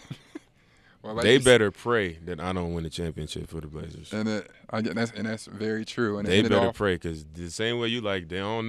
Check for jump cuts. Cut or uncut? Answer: cut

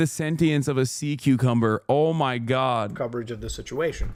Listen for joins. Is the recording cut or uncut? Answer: uncut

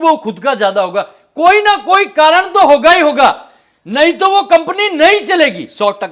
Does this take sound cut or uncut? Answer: uncut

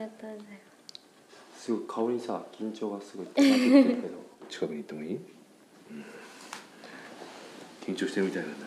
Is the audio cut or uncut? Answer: cut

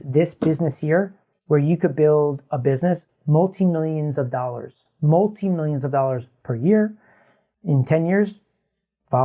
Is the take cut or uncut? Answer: cut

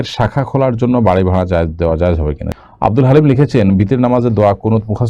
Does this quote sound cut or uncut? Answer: cut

